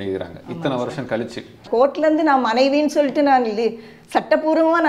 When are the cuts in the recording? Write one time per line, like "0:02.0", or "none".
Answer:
0:01.6